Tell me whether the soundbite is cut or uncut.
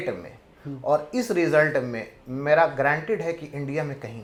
uncut